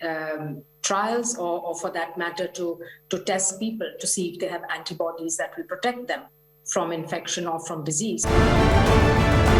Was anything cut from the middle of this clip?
yes; 1 cut; at 8.2 s

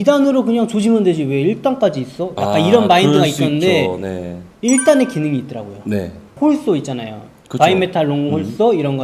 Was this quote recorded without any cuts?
yes; 0 cuts

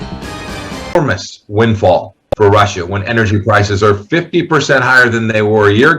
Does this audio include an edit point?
yes; 1 cut; at 1.0 s

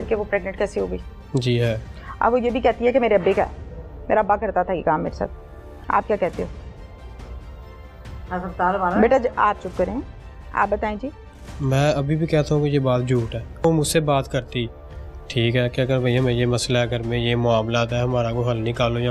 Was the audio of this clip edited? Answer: no; 0 cuts

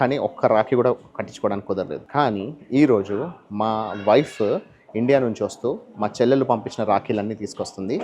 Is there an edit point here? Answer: yes; 1 cut; at 2.0 s

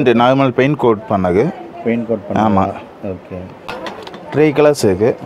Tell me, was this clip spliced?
yes; 1 cut; at 3.8 s

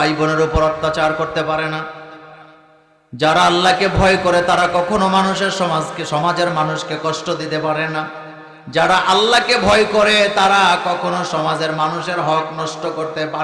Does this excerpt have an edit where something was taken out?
no; 0 cuts

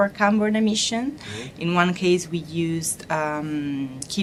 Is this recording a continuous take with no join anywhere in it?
yes; 0 cuts

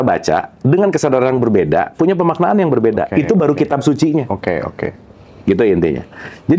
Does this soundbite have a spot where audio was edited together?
no; 0 cuts

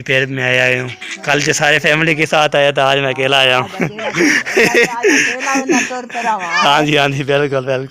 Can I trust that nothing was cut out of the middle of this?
yes; 0 cuts

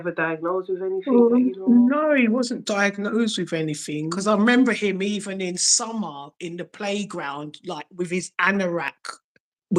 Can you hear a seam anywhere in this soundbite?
yes; 1 cut; at 4.1 s

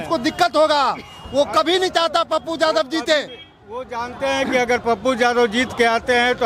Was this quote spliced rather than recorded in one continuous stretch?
no; 0 cuts

